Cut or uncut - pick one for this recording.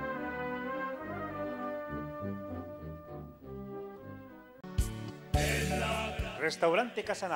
cut